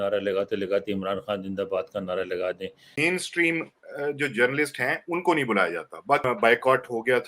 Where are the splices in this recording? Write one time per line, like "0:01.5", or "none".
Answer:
0:02.9
0:06.2